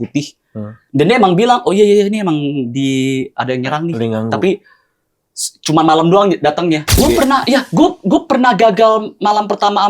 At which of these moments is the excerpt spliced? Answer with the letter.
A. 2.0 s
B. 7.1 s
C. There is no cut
B